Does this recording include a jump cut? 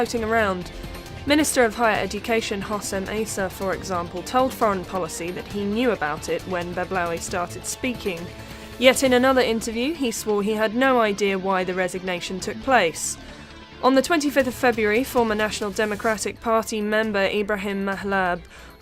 yes; 1 cut; at 10.5 s

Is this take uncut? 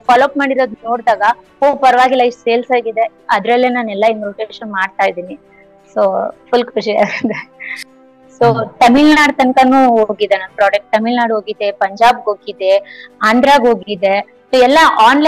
no; 1 cut; at 7.7 s

